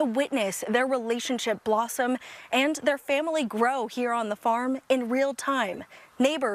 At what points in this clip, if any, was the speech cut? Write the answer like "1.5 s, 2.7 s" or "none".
none